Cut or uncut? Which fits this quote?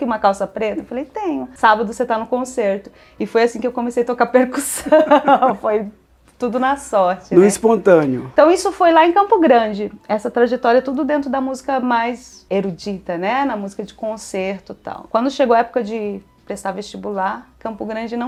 uncut